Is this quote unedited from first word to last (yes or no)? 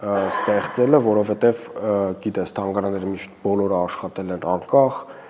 yes